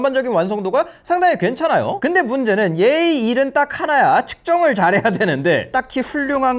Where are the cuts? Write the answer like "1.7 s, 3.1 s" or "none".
5.7 s